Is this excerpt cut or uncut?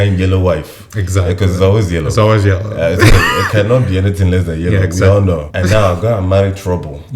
cut